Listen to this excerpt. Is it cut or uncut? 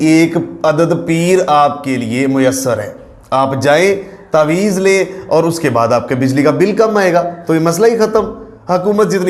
uncut